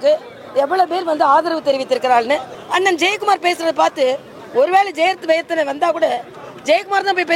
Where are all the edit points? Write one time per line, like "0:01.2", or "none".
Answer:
0:02.6